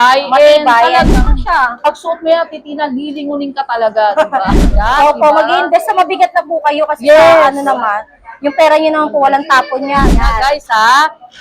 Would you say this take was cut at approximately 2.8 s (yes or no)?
no